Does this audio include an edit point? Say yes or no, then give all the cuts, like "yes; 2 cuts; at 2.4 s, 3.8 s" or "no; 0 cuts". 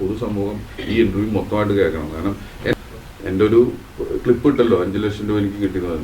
yes; 1 cut; at 2.7 s